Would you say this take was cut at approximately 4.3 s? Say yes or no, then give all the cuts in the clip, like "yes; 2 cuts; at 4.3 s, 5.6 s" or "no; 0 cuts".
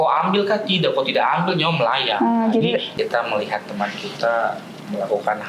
no; 1 cut; at 2.9 s